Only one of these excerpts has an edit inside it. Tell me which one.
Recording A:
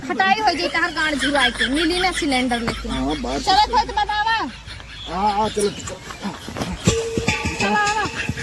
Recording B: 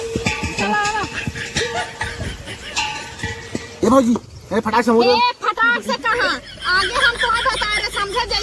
B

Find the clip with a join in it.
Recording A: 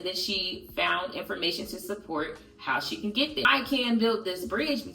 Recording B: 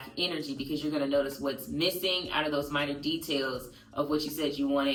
A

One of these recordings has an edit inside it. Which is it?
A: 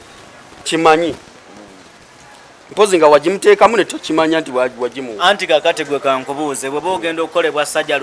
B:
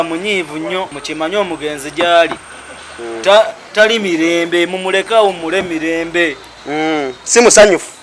B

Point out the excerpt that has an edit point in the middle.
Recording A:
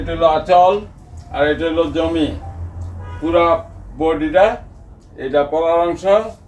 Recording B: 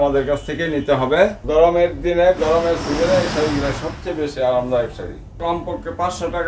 B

